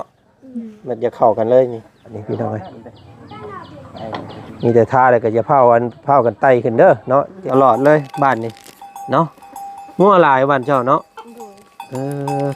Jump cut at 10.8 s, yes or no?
no